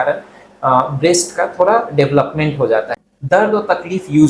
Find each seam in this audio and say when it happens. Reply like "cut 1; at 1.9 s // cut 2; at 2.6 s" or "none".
cut 1; at 3.0 s